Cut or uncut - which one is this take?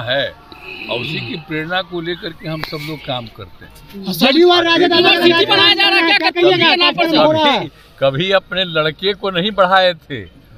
uncut